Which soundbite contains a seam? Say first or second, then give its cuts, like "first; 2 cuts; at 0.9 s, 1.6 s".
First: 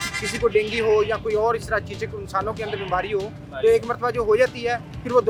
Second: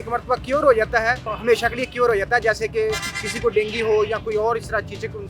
second; 1 cut; at 1.4 s